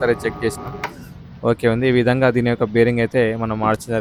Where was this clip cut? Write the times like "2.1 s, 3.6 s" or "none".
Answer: none